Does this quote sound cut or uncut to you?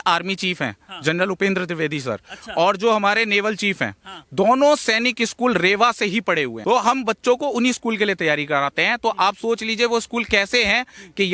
uncut